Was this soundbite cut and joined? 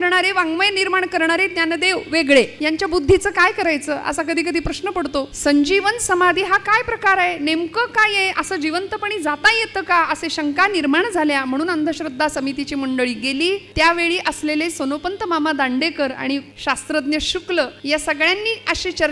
yes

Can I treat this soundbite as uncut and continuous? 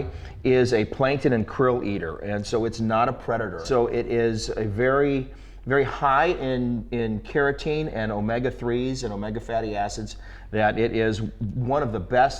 yes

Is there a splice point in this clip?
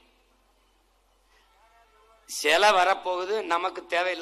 yes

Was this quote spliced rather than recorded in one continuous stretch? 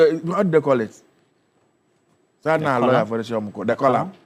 no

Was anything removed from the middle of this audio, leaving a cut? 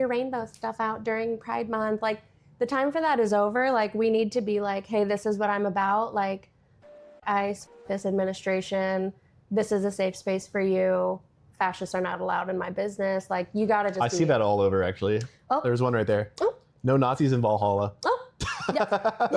no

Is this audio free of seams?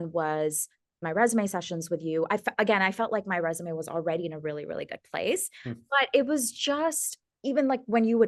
no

